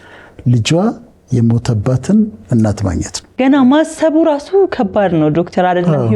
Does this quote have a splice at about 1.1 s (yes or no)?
no